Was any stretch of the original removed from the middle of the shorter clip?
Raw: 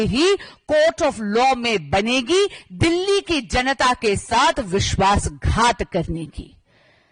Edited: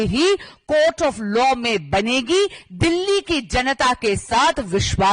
no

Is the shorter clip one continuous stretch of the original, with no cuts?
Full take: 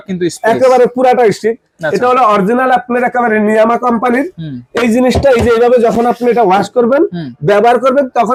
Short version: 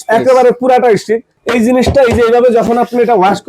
no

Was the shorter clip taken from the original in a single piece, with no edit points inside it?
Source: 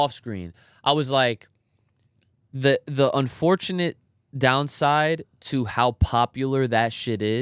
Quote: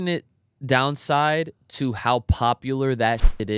yes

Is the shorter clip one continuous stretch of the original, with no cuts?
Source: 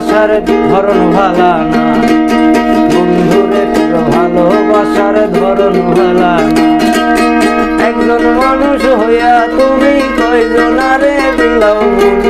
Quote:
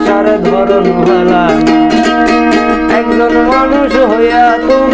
yes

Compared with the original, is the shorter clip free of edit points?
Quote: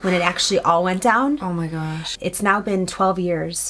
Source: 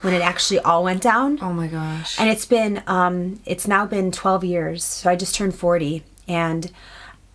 no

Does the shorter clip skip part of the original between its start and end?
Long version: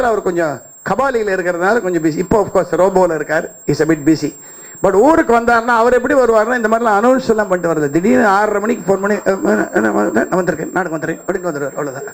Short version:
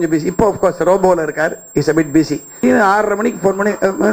yes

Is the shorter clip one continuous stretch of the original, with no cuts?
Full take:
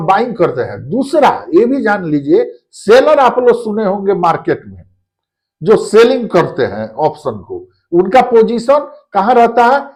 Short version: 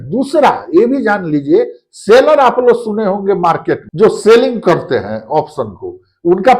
no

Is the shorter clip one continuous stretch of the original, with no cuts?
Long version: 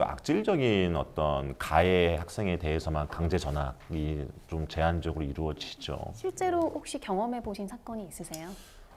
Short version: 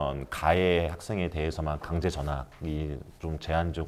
yes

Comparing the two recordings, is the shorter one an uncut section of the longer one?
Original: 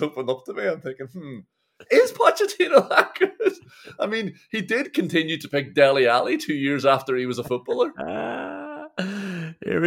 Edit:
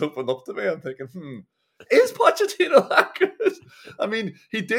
yes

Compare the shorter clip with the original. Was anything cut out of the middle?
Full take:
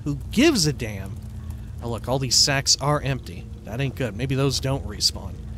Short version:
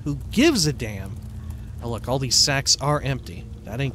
no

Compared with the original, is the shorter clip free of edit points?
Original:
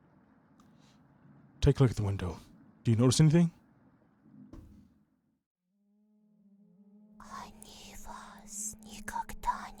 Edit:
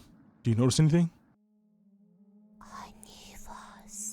no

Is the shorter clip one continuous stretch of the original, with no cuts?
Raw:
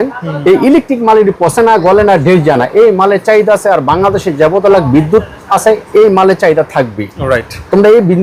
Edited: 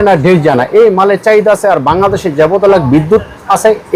yes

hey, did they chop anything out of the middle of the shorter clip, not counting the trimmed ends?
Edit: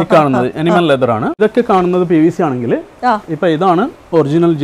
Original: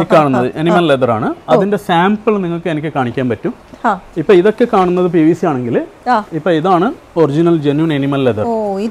yes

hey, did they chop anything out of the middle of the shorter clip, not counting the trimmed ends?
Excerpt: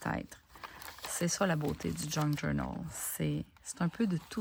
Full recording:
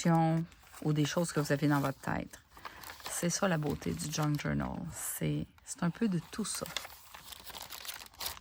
no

